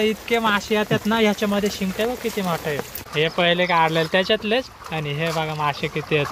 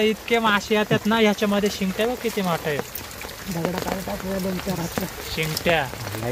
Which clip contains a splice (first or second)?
first